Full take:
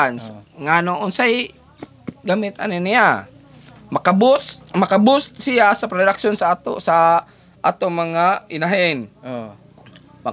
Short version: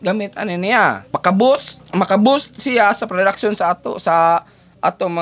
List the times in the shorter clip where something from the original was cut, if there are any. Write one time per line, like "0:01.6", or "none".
0:01.0